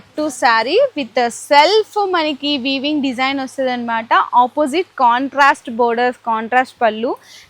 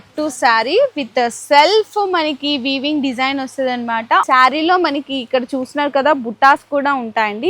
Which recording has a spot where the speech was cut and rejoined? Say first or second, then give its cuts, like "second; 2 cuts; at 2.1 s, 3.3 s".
second; 1 cut; at 4.2 s